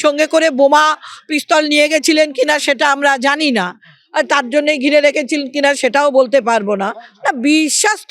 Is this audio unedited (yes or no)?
no